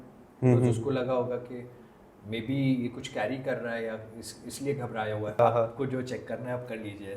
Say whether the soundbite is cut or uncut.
cut